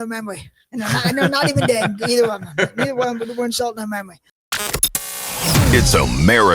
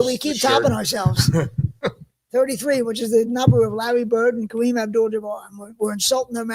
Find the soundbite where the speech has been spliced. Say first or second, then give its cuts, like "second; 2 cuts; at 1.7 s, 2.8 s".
first; 1 cut; at 4.4 s